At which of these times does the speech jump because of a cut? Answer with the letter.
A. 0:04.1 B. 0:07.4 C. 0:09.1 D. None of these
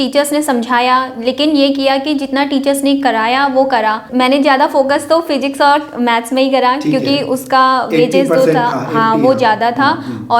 A